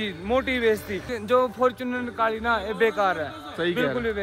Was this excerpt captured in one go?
no; 1 cut; at 1.1 s

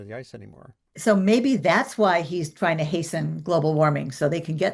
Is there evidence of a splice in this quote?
no; 0 cuts

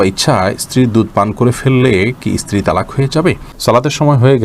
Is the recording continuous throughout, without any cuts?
no; 1 cut; at 3.5 s

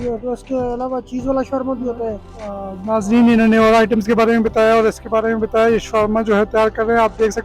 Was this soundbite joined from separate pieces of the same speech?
yes; 1 cut; at 2.3 s

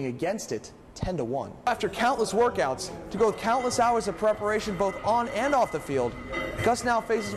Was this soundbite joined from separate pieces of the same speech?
yes; 1 cut; at 1.7 s

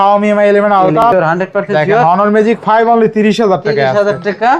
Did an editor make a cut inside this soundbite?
yes; 1 cut; at 1.0 s

